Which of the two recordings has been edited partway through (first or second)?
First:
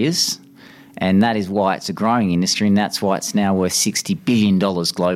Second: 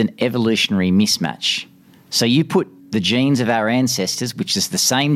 second